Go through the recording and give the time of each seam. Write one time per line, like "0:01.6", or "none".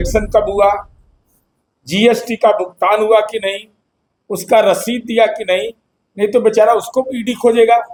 none